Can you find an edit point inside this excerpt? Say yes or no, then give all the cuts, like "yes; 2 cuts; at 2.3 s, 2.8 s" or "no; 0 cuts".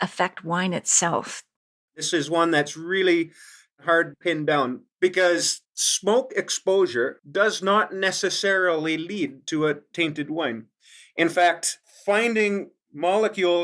yes; 2 cuts; at 2.1 s, 3.8 s